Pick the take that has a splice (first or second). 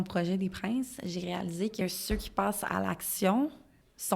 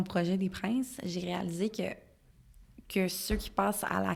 first